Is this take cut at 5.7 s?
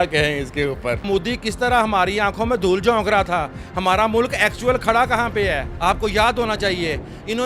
yes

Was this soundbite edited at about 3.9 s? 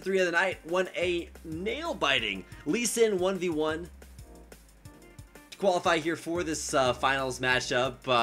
no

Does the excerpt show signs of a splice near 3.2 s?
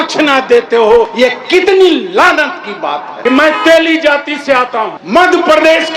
yes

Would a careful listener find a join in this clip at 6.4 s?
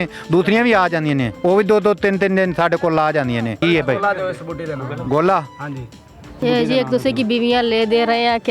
yes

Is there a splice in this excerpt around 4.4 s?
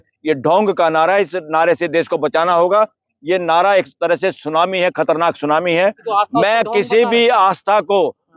no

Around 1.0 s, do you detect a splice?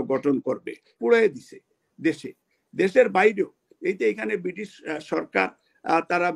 yes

